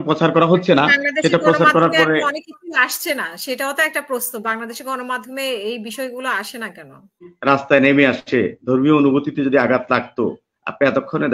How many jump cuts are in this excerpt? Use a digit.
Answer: 1